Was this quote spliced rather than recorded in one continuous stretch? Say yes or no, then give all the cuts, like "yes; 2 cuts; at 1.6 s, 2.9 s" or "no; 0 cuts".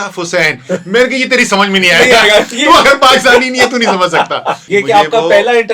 yes; 1 cut; at 4.6 s